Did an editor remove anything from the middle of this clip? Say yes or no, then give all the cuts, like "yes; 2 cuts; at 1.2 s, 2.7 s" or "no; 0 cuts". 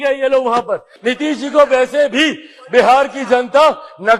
yes; 1 cut; at 0.9 s